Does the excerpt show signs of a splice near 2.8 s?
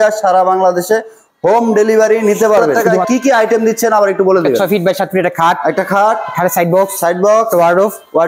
yes; 1 cut; at 2.8 s

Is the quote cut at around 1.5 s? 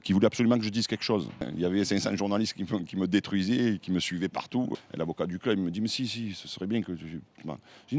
yes; 2 cuts; at 1.5 s, 4.7 s

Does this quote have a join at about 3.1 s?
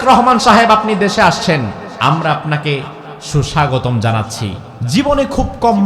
no; 2 cuts; at 1.8 s, 4.7 s

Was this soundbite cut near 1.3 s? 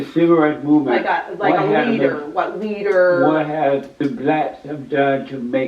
no; 1 cut; at 3.9 s

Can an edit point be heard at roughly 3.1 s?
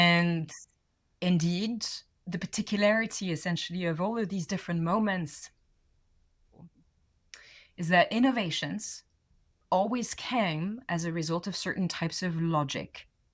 no; 1 cut; at 6.7 s

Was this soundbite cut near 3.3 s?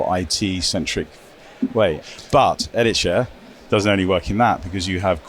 no; 1 cut; at 2.0 s

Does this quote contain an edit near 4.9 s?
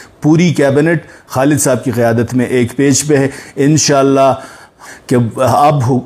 yes; 1 cut; at 4.9 s

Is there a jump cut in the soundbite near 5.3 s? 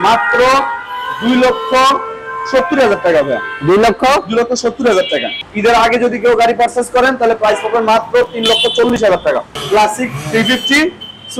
yes; 2 cuts; at 5.3 s, 9.5 s

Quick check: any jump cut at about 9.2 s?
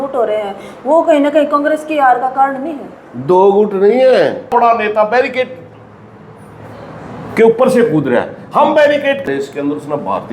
yes; 2 cuts; at 4.5 s, 9.2 s

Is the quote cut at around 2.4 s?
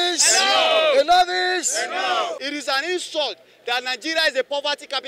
yes; 1 cut; at 2.4 s

